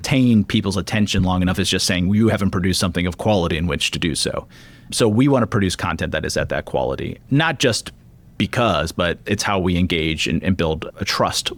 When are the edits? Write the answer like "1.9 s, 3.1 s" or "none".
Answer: none